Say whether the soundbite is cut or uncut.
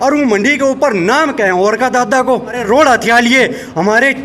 cut